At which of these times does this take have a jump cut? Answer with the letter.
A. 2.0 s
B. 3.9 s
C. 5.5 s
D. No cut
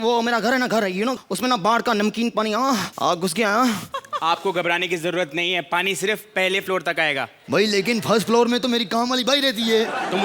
B